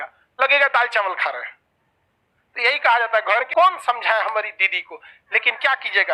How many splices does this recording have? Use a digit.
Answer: 1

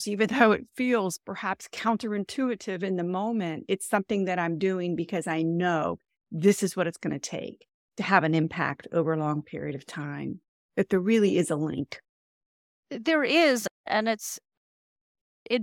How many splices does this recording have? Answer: 0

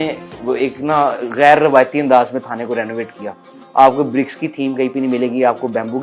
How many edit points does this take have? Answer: 0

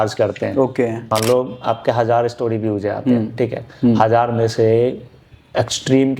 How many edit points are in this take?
1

